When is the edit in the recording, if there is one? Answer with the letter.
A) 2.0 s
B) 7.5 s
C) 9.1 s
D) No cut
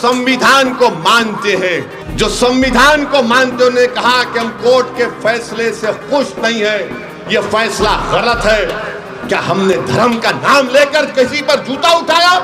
A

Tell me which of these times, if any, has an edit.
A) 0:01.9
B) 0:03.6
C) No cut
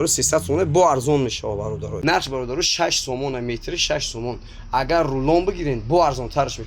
A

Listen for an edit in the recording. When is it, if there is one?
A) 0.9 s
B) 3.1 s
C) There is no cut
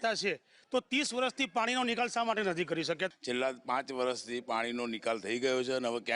B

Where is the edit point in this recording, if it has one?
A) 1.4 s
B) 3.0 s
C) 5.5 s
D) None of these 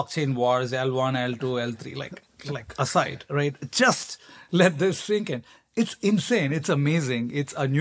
D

